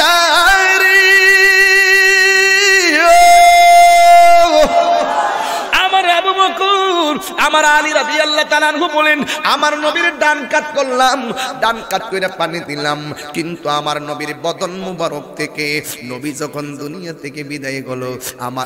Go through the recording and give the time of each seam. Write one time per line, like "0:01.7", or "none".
none